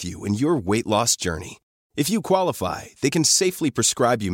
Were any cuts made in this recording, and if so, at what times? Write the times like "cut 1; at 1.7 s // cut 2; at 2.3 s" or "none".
none